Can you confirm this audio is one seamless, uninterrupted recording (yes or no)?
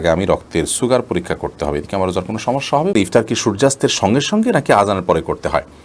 no